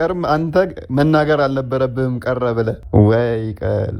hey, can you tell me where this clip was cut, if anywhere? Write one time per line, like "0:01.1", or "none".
0:02.8